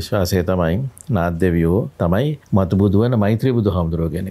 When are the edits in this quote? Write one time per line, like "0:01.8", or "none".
0:02.1